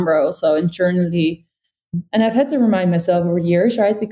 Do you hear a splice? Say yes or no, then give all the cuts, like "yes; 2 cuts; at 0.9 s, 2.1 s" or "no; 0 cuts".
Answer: yes; 1 cut; at 2.0 s